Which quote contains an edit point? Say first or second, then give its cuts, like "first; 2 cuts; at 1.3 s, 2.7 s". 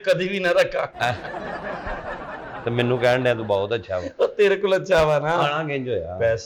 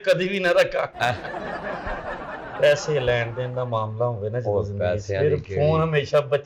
second; 1 cut; at 2.5 s